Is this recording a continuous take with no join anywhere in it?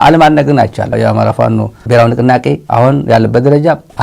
no; 1 cut; at 0.9 s

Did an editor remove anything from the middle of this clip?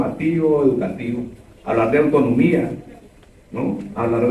no; 0 cuts

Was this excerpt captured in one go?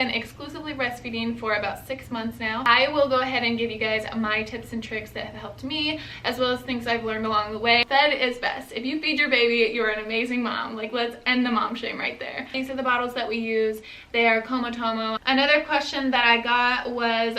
no; 4 cuts; at 2.7 s, 7.8 s, 12.5 s, 15.2 s

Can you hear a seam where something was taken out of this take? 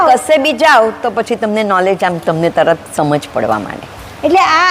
no; 0 cuts

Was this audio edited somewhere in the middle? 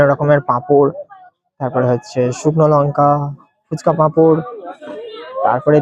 no; 0 cuts

